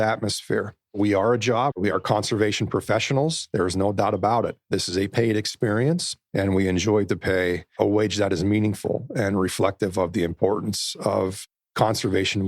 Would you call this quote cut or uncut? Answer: cut